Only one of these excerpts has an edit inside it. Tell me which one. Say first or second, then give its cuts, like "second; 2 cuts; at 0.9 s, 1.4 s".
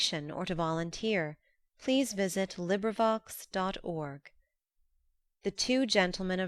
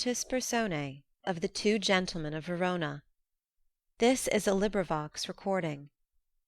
second; 1 cut; at 1.1 s